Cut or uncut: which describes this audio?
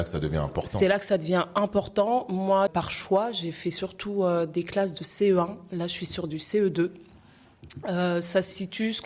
cut